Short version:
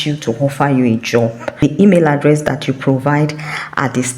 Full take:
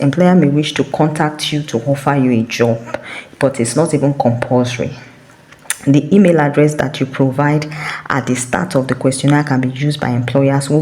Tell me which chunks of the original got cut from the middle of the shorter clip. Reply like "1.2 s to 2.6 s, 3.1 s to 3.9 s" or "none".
3.1 s to 5.9 s